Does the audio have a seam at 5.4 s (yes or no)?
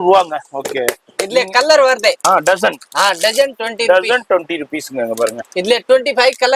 no